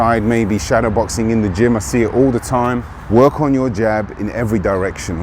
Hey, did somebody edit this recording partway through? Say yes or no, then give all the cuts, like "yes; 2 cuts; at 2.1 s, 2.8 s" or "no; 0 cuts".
yes; 1 cut; at 2.9 s